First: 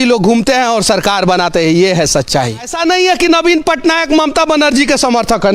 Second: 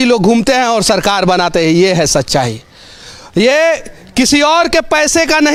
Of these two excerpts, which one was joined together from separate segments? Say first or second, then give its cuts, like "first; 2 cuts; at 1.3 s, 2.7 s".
first; 1 cut; at 2.7 s